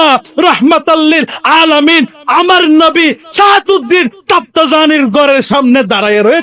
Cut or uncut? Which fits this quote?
uncut